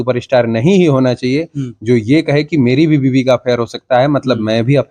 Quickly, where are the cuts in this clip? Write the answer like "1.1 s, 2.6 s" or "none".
none